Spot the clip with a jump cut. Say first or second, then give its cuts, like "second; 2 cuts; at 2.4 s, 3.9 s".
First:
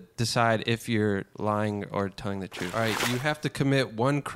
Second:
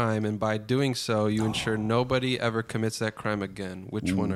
first; 2 cuts; at 1.3 s, 2.7 s